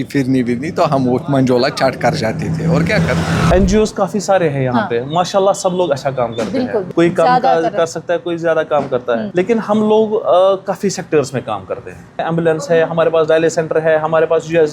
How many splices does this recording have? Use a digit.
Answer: 4